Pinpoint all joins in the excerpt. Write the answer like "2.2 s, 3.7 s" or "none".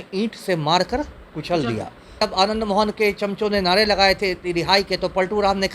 2.2 s